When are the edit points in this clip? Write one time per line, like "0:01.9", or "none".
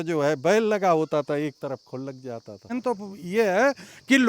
0:02.7